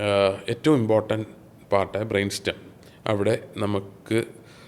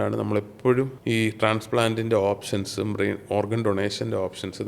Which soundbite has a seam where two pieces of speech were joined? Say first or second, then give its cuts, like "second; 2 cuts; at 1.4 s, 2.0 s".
second; 1 cut; at 1.0 s